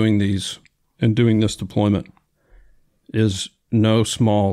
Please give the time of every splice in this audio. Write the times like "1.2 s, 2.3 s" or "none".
none